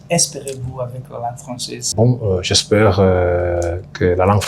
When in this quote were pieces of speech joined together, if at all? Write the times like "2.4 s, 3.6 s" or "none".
1.8 s

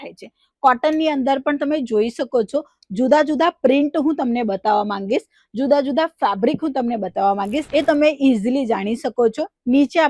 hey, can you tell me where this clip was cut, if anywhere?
7.6 s

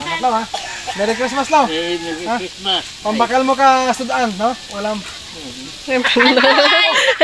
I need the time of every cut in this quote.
none

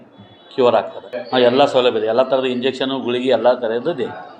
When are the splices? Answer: 1.1 s

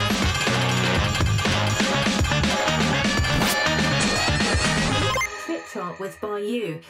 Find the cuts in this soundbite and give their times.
none

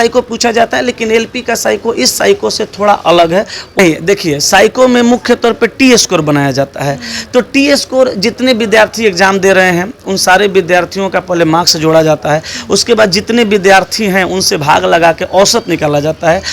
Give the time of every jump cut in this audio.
3.8 s

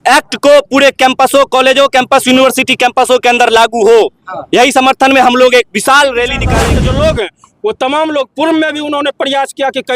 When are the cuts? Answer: 6.4 s

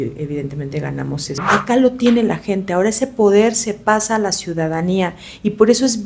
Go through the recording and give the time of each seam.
1.3 s

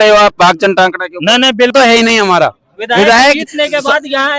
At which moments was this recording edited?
1.7 s

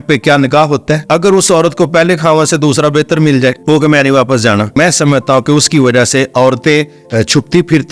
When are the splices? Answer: 1.0 s, 3.6 s, 4.8 s

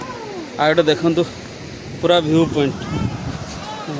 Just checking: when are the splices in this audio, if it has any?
none

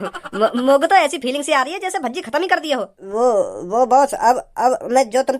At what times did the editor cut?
3.0 s

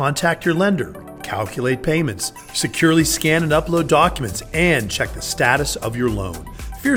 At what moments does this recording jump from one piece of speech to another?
none

